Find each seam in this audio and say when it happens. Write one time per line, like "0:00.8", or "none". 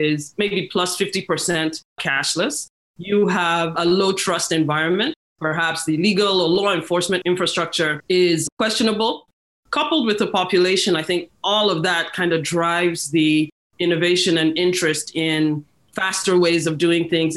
0:05.2
0:07.5
0:09.3